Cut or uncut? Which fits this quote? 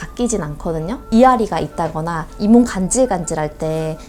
cut